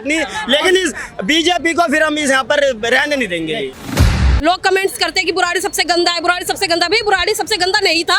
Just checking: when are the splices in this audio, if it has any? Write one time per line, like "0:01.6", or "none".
0:03.9